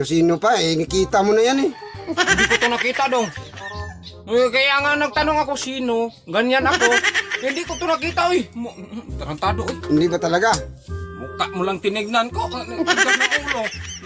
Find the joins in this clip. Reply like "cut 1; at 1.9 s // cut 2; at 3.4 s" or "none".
none